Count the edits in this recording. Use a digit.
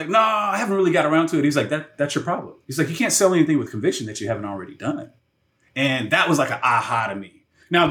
0